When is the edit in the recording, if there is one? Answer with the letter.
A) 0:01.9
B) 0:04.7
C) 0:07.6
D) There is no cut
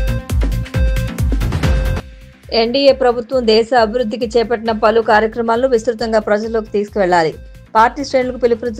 A